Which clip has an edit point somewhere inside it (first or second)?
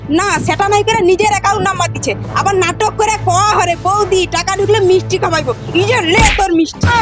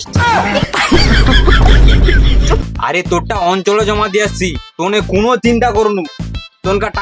second